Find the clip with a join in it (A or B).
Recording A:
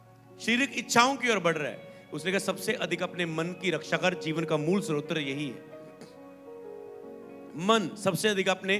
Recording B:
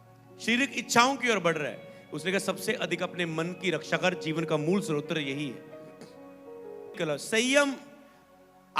B